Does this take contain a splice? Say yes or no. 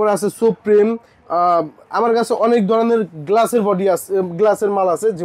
no